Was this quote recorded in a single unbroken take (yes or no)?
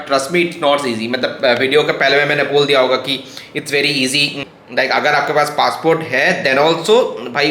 no